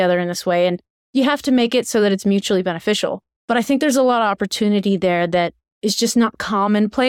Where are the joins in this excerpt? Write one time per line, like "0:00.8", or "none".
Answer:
0:03.3
0:05.6